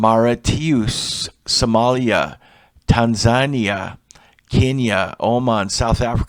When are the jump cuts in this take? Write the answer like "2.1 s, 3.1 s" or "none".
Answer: none